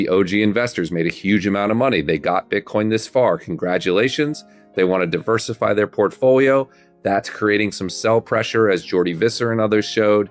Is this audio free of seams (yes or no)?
yes